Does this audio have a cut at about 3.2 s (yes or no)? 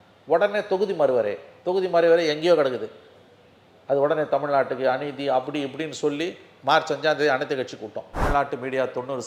no